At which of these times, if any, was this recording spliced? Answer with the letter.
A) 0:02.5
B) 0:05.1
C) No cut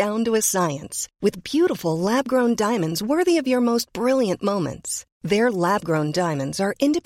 C